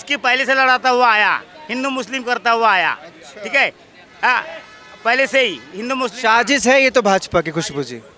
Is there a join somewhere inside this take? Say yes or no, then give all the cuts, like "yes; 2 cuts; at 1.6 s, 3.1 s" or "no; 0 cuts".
no; 0 cuts